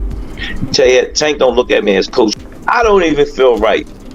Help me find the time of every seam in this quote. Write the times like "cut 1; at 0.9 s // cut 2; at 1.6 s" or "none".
cut 1; at 2.3 s